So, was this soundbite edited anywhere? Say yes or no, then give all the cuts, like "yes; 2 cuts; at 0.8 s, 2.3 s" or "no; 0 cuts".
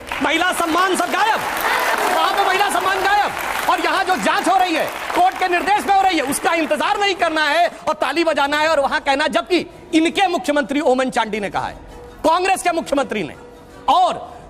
no; 0 cuts